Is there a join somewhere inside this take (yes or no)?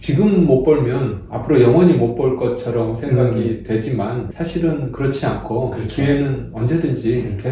no